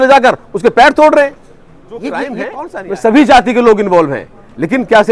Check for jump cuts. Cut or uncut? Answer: cut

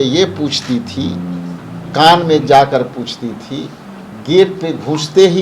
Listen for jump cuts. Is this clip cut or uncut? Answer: uncut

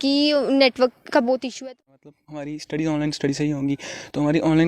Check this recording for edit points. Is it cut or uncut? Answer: cut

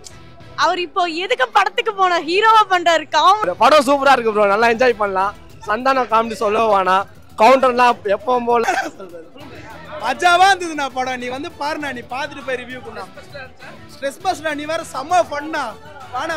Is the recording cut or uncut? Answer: cut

